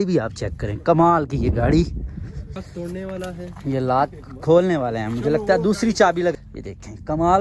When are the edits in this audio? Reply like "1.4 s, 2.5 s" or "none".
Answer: 2.6 s, 6.3 s